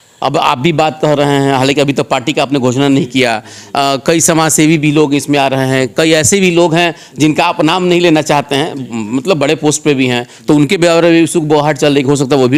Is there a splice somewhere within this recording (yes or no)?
no